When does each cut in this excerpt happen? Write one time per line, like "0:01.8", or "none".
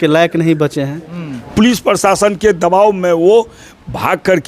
0:01.5